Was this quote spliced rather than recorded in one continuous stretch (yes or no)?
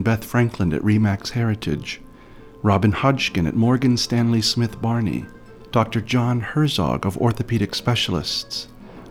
no